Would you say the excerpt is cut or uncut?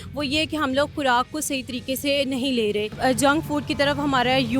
cut